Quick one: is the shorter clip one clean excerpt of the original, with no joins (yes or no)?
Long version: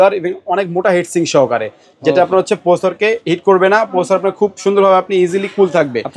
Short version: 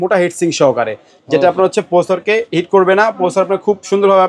yes